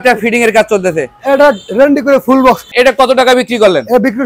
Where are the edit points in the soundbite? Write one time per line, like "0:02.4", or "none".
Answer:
0:02.7